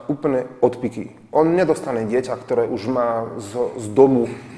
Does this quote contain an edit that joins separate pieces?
no; 0 cuts

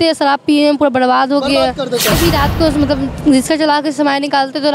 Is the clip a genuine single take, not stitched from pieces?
no; 1 cut; at 2.2 s

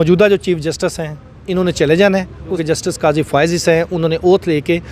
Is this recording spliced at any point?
yes; 1 cut; at 2.6 s

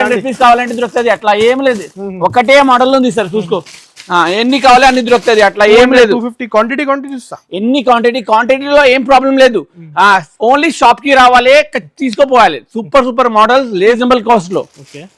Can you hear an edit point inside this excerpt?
yes; 1 cut; at 14.0 s

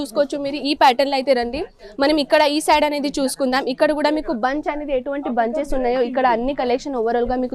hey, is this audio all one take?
yes; 0 cuts

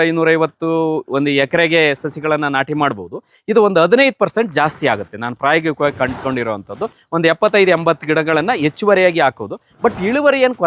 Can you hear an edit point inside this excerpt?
no; 0 cuts

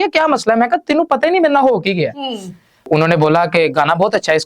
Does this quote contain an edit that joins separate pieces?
yes; 1 cut; at 2.9 s

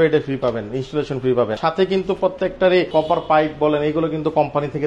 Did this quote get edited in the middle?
yes; 2 cuts; at 1.6 s, 2.9 s

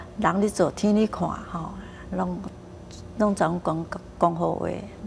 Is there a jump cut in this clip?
no; 0 cuts

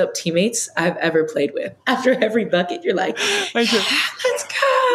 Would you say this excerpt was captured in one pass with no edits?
no; 1 cut; at 1.7 s

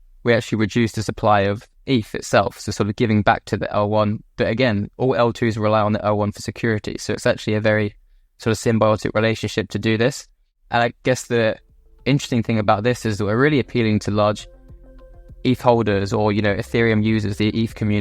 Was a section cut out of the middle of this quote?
yes; 1 cut; at 10.6 s

